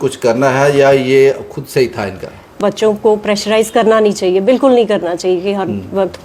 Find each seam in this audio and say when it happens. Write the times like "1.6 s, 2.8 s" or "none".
2.5 s